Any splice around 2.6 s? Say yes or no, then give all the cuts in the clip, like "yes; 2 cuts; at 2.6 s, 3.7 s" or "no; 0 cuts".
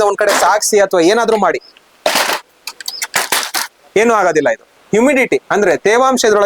no; 1 cut; at 4.8 s